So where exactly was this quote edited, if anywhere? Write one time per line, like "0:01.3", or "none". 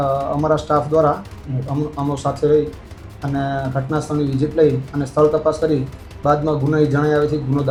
none